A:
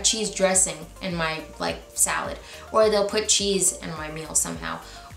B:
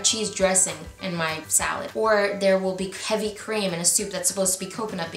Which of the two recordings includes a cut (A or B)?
B